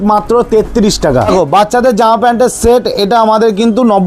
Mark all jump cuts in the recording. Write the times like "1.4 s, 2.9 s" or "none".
1.3 s